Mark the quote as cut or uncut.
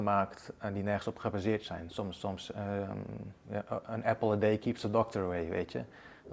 uncut